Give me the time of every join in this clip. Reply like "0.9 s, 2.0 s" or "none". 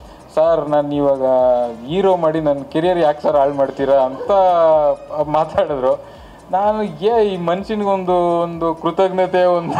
none